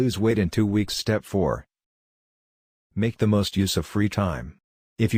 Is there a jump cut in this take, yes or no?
no